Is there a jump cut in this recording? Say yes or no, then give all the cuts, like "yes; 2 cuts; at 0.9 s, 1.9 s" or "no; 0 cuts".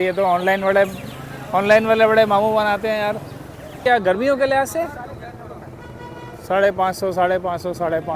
yes; 1 cut; at 3.8 s